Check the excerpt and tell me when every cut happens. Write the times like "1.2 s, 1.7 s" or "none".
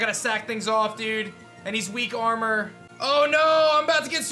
2.8 s